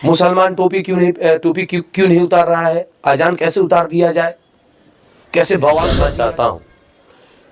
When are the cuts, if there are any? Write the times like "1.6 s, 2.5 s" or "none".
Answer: 6.0 s